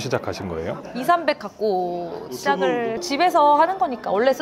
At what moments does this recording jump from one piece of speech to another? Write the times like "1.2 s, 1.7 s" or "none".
3.0 s